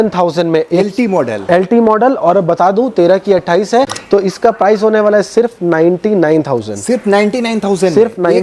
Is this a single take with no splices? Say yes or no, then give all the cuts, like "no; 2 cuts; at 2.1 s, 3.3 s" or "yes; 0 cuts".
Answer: no; 1 cut; at 4.0 s